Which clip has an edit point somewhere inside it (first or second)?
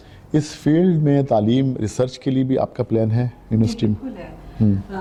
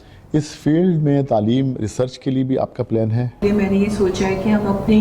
second